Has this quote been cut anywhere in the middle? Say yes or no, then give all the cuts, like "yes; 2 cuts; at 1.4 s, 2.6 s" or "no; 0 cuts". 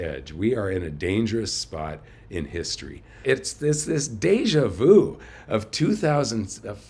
yes; 1 cut; at 3.2 s